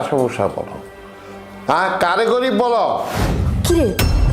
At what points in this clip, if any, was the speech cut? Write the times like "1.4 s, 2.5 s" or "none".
3.3 s